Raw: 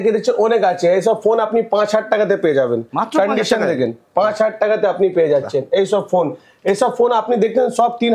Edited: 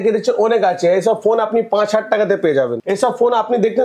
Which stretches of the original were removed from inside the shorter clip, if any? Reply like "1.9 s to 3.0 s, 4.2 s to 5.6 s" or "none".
2.8 s to 6.6 s